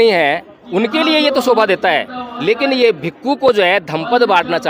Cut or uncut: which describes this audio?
uncut